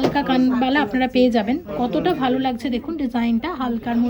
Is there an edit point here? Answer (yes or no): no